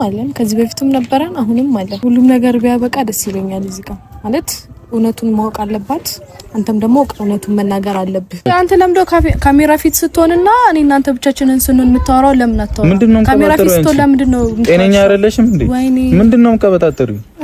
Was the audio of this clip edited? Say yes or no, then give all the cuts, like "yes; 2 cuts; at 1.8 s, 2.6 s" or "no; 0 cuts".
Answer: yes; 2 cuts; at 1.9 s, 8.5 s